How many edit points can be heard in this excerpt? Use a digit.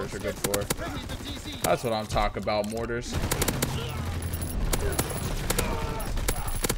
3